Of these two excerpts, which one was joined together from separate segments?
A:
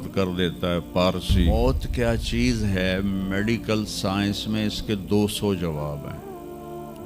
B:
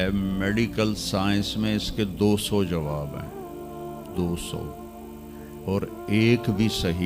A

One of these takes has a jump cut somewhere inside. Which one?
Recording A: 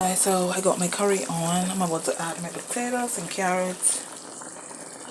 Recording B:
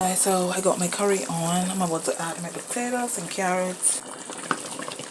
B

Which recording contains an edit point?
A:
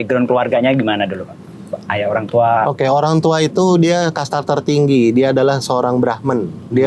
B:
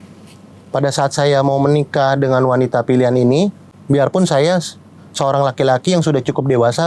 B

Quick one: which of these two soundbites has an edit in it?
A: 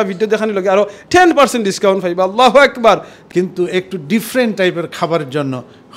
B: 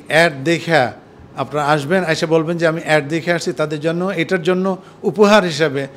A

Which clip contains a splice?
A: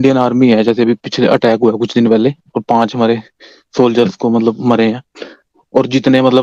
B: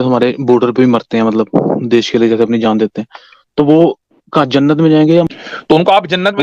B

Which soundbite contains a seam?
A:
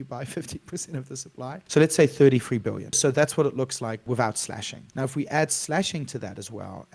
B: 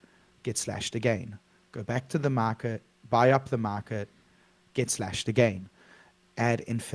A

